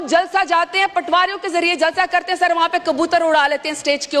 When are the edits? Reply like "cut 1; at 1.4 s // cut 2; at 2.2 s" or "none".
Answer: none